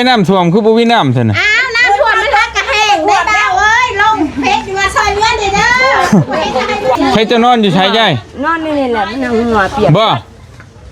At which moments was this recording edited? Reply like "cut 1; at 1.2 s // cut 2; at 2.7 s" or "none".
cut 1; at 7.0 s